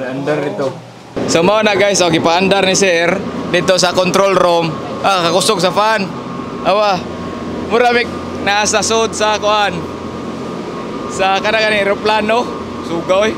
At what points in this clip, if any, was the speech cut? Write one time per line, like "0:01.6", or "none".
0:01.2